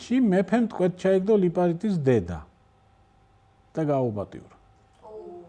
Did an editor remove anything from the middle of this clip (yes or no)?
no